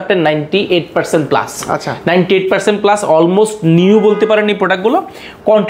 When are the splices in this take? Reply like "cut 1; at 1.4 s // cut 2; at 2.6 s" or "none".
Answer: none